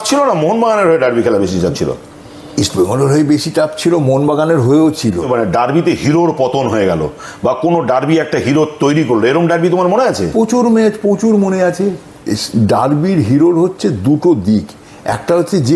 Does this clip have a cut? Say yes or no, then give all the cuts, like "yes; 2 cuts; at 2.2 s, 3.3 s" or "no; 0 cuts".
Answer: yes; 2 cuts; at 5.3 s, 12.2 s